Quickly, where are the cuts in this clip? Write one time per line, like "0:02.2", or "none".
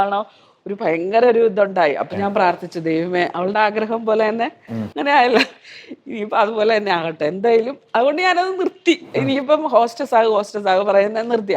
none